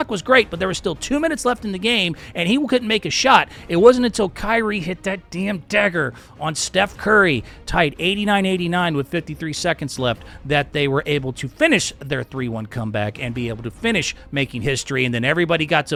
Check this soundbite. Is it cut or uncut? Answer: uncut